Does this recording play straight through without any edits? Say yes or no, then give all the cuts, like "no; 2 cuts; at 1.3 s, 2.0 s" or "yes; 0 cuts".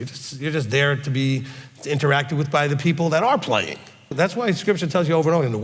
no; 1 cut; at 4.1 s